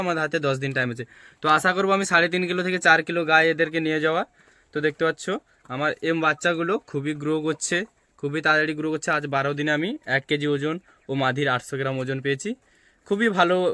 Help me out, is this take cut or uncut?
uncut